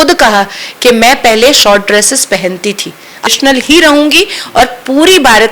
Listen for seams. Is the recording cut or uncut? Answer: cut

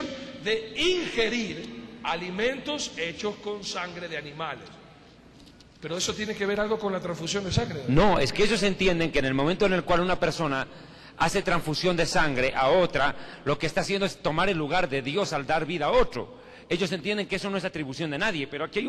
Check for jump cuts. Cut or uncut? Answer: cut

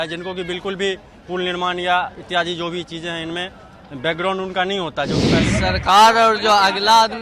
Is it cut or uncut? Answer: cut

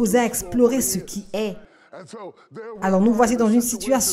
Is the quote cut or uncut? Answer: uncut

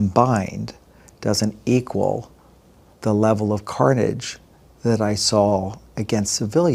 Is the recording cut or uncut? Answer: uncut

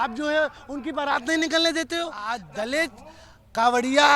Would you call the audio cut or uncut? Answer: cut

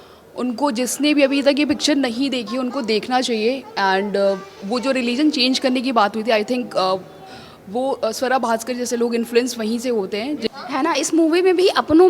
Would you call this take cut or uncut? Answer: cut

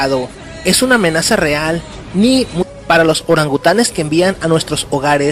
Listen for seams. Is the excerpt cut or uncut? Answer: uncut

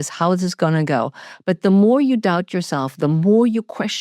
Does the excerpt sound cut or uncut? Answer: uncut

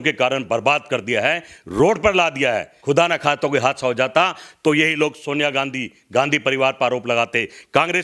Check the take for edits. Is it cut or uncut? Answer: cut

